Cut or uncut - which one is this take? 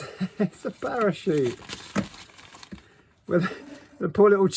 uncut